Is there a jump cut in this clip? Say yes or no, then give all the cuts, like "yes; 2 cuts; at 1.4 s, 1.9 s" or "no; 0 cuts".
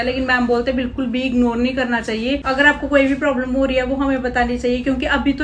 no; 0 cuts